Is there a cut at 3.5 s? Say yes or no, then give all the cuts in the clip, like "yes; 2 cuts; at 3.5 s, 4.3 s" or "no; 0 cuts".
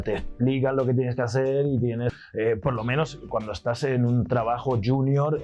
no; 1 cut; at 2.1 s